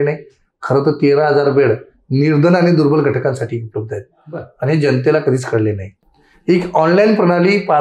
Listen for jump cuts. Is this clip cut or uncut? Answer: uncut